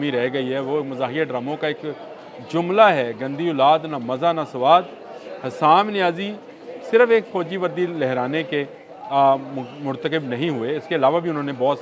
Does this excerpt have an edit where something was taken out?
no; 0 cuts

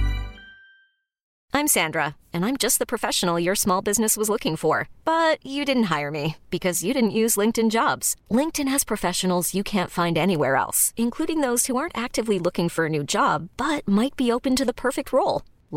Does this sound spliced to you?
yes; 1 cut; at 1.2 s

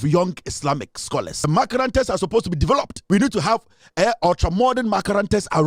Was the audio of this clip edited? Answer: yes; 2 cuts; at 1.3 s, 3.0 s

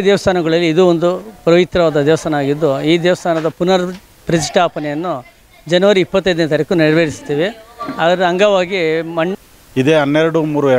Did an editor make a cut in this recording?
yes; 1 cut; at 9.4 s

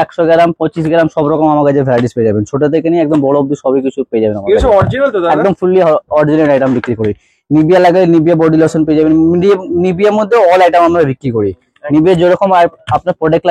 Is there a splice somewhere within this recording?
no; 0 cuts

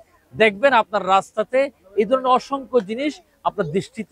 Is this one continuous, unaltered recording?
yes; 0 cuts

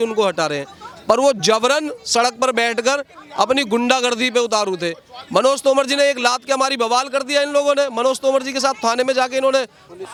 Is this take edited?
no; 0 cuts

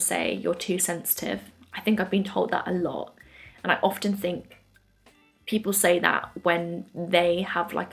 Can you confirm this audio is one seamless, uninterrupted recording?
yes; 0 cuts

